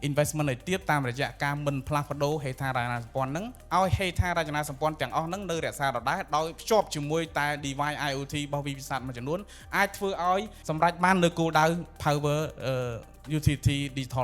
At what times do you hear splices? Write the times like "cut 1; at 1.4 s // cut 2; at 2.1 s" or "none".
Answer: cut 1; at 3.6 s // cut 2; at 6.6 s // cut 3; at 10.6 s